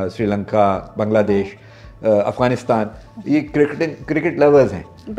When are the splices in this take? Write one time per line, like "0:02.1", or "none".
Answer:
none